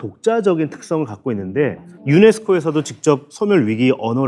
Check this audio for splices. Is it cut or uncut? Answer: uncut